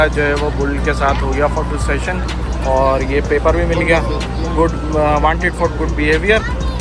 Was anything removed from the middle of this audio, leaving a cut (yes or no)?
no